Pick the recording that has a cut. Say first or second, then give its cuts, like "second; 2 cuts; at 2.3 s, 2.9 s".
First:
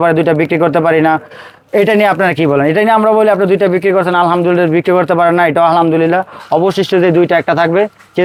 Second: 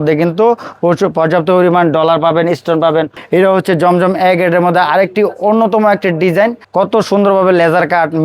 second; 2 cuts; at 3.2 s, 6.6 s